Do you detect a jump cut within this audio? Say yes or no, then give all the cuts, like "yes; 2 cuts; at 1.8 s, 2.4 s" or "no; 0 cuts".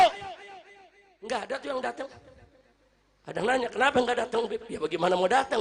no; 0 cuts